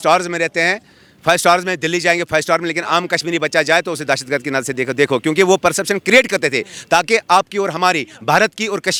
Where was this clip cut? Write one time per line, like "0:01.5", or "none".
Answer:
none